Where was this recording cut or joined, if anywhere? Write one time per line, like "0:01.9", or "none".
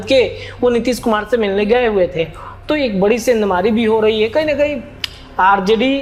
none